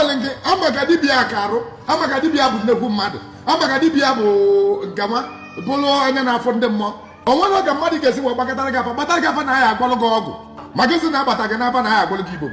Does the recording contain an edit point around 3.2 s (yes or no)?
no